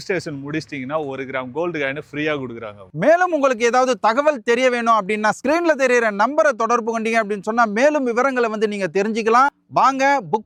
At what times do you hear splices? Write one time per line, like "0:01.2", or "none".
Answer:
none